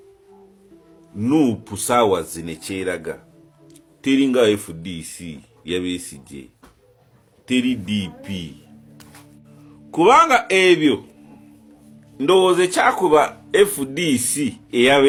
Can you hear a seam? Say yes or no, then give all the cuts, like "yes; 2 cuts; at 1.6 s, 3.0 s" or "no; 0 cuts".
no; 0 cuts